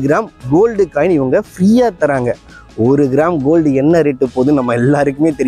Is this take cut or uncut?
uncut